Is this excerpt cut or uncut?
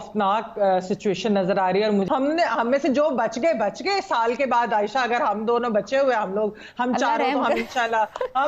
cut